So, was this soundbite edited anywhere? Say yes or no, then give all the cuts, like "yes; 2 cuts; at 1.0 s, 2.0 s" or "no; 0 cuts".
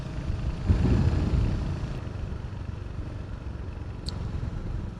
yes; 1 cut; at 2.0 s